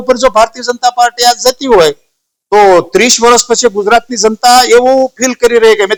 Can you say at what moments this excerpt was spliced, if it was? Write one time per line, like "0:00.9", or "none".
none